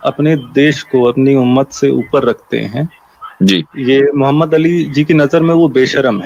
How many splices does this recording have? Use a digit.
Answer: 0